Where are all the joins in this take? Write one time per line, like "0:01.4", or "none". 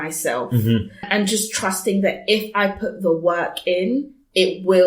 0:01.1